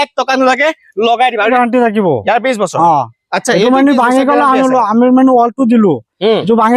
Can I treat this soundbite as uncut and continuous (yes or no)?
no